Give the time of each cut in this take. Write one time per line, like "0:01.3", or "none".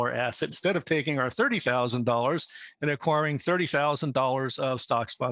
none